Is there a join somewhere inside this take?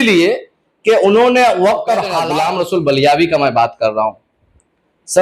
yes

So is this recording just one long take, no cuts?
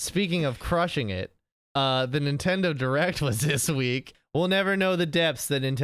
no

